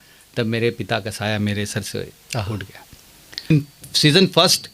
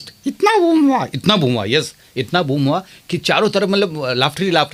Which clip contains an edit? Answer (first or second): first